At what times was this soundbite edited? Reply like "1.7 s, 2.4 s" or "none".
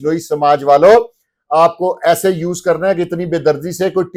none